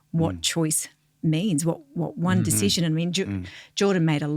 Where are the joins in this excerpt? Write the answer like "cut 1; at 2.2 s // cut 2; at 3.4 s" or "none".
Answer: none